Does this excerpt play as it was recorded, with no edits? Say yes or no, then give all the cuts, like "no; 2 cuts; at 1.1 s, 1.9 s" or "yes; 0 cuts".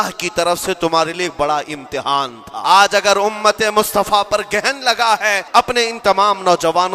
no; 2 cuts; at 2.5 s, 5.4 s